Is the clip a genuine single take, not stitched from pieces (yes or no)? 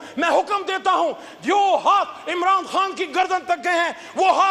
yes